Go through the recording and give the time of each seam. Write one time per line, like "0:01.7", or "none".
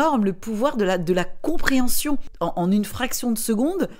0:02.3